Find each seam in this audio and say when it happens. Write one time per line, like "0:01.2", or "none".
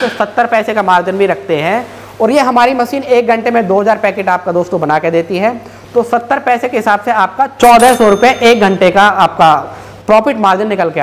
none